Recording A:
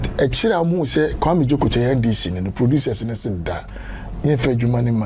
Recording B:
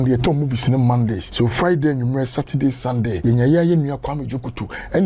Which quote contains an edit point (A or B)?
B